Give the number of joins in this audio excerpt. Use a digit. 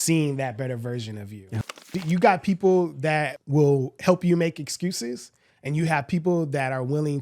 2